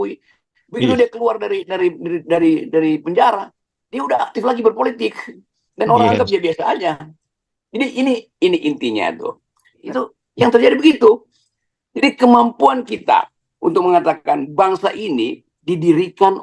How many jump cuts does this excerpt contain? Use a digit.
1